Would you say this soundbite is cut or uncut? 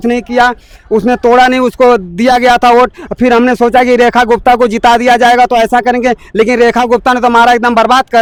uncut